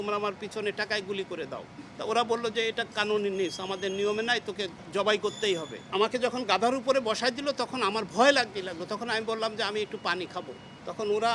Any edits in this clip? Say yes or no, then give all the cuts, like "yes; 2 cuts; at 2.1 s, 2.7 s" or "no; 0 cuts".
no; 0 cuts